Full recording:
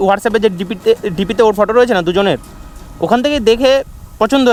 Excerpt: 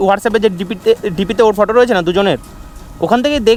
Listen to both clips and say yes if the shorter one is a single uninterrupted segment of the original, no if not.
yes